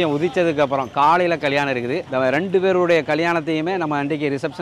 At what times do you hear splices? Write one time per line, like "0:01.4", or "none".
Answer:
none

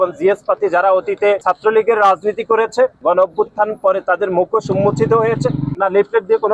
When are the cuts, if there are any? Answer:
0:01.4
0:03.0
0:05.7

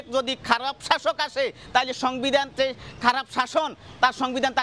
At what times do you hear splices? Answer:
none

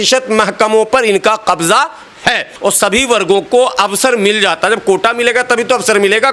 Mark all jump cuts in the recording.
0:02.5

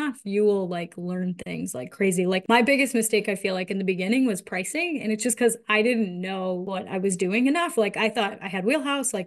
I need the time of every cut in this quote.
0:02.4
0:06.7

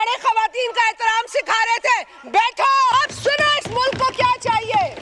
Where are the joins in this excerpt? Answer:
0:02.9

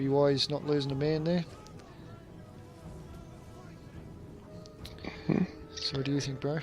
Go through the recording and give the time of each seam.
0:04.3

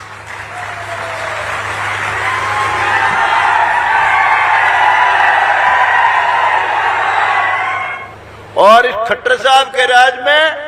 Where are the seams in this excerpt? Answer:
0:07.9

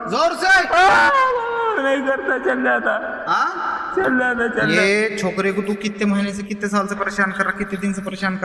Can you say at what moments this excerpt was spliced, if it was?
0:04.7

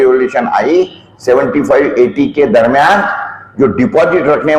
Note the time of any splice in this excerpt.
none

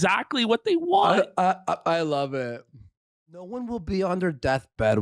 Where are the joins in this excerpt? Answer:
0:03.5

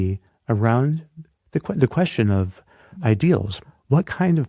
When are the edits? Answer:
0:02.9
0:03.6

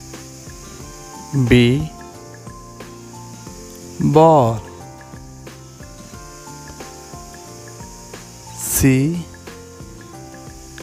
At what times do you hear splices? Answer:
0:01.3
0:02.5
0:04.0
0:05.0
0:08.6
0:09.3

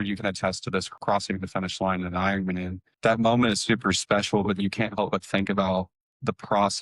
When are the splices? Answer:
0:00.9
0:02.9

